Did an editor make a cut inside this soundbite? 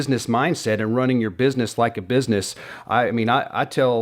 no; 0 cuts

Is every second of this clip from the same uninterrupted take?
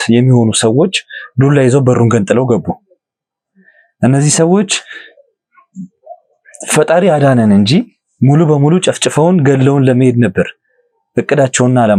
yes; 0 cuts

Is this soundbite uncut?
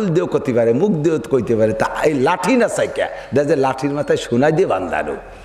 yes; 0 cuts

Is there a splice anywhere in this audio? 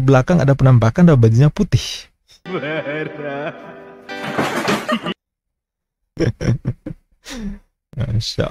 no; 0 cuts

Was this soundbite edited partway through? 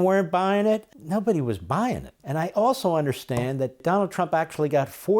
yes; 3 cuts; at 0.9 s, 2.1 s, 3.8 s

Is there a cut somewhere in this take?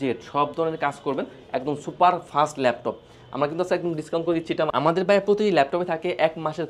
yes; 1 cut; at 4.7 s

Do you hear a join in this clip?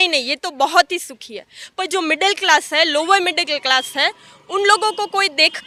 no; 0 cuts

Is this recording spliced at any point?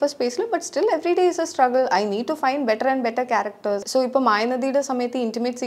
yes; 1 cut; at 3.8 s

